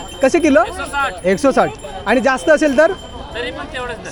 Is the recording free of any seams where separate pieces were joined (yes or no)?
yes